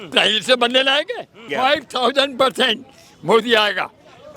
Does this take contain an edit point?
yes; 1 cut; at 1.4 s

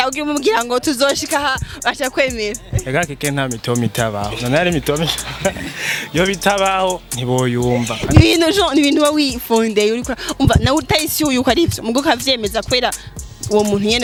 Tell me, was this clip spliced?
no; 0 cuts

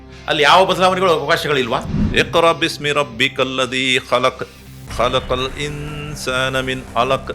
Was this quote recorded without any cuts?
no; 1 cut; at 2.0 s

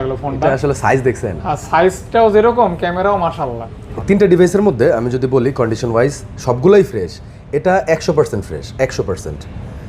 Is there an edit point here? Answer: yes; 1 cut; at 3.9 s

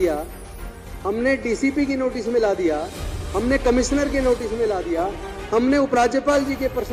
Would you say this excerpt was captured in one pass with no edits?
yes; 0 cuts

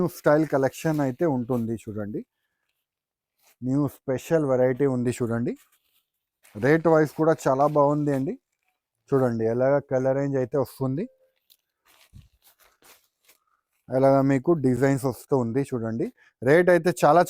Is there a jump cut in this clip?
no; 0 cuts

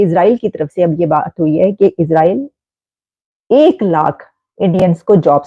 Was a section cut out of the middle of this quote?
no; 0 cuts

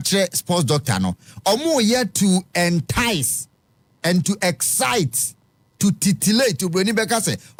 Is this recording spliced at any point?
no; 0 cuts

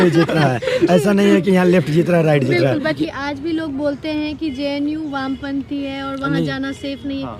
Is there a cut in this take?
yes; 1 cut; at 3.0 s

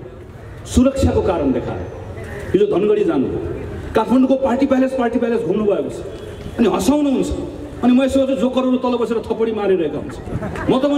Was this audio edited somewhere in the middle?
no; 0 cuts

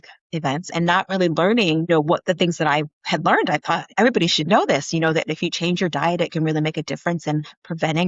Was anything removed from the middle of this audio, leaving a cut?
no; 0 cuts

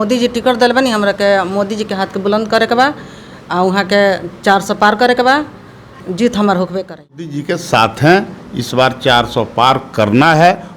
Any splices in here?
yes; 1 cut; at 7.4 s

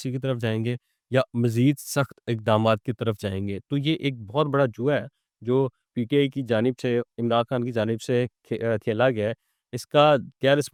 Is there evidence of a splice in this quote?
no; 0 cuts

